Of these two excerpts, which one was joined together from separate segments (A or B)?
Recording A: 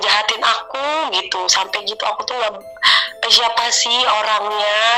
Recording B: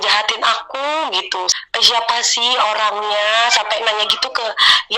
B